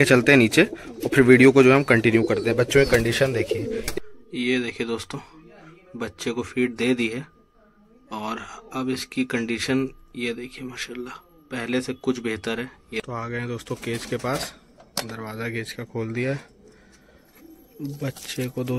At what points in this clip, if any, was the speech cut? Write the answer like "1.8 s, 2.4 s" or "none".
3.9 s, 13.0 s